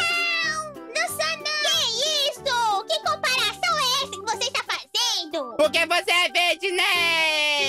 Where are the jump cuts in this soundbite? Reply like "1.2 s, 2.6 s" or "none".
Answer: 5.5 s